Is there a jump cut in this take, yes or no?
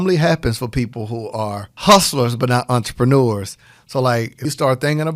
yes